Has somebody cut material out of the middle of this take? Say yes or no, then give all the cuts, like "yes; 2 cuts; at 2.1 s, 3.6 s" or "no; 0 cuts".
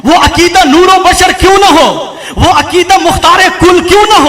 no; 0 cuts